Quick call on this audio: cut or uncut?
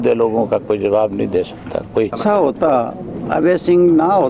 cut